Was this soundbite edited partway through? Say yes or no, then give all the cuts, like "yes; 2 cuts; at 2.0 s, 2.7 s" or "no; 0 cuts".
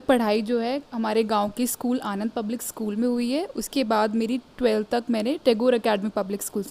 no; 0 cuts